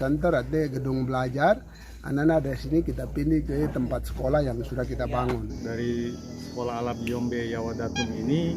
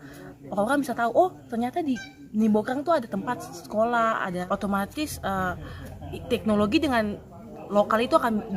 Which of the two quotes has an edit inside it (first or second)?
first